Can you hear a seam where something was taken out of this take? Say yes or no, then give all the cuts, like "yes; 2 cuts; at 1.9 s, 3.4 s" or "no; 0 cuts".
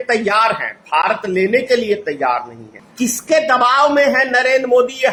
no; 0 cuts